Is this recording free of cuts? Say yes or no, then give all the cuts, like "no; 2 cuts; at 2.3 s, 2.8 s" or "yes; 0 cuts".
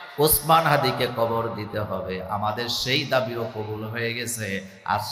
yes; 0 cuts